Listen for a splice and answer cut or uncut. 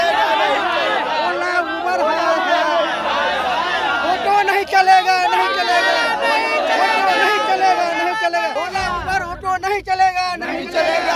cut